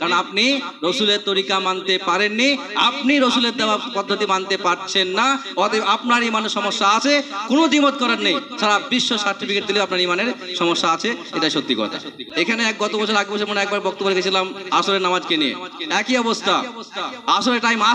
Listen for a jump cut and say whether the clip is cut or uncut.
cut